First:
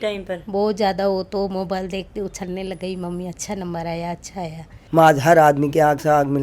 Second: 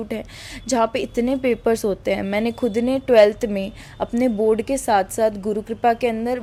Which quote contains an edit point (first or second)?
first